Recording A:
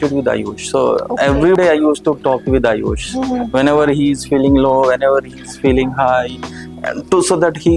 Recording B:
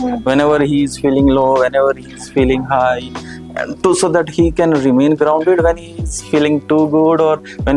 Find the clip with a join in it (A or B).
A